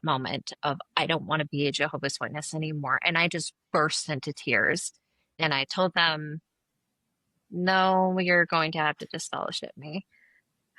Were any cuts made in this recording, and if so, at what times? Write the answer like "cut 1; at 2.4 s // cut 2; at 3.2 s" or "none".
cut 1; at 4.9 s